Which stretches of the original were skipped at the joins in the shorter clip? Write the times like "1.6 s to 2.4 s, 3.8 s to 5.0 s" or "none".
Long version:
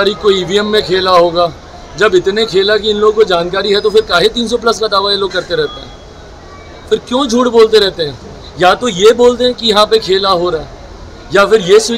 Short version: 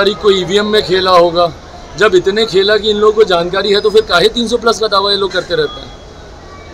none